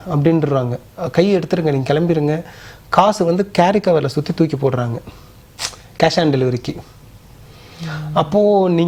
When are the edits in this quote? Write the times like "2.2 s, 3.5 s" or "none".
none